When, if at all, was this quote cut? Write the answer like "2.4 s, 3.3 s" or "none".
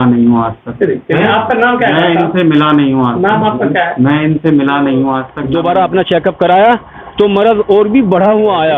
5.3 s

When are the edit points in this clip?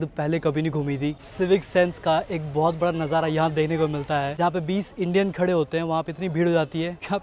1.2 s, 4.3 s

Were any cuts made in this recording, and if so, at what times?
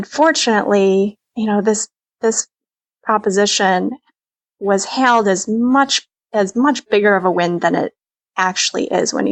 1.2 s

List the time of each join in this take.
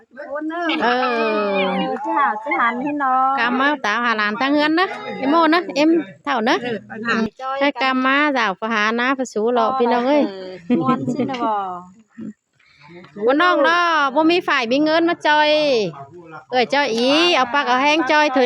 7.3 s

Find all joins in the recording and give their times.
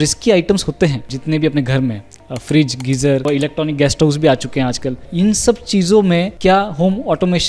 1.1 s, 3.2 s, 5.1 s, 6.3 s

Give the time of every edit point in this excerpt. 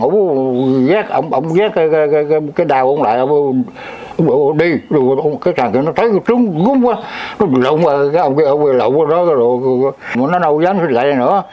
10.2 s

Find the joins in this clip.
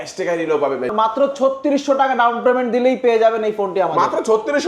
0.9 s

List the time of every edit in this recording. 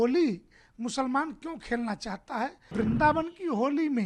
2.7 s

